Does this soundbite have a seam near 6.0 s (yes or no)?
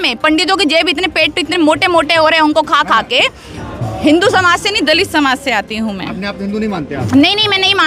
no